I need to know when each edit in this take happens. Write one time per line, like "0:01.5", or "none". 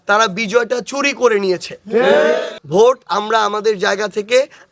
0:02.6